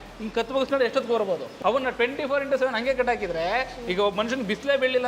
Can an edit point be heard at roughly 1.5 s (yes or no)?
yes